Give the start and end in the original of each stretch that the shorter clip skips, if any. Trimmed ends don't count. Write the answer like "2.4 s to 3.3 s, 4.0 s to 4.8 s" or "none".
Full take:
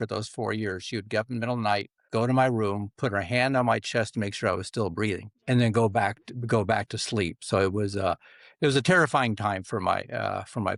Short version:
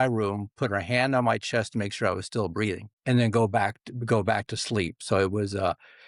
none